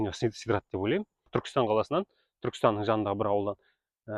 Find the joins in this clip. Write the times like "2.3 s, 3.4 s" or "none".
1.2 s